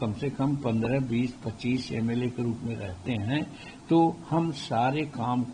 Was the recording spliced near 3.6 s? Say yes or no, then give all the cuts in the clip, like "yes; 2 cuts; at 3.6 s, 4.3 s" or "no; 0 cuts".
no; 0 cuts